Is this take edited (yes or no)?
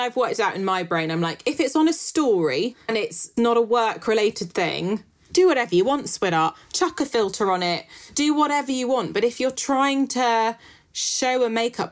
yes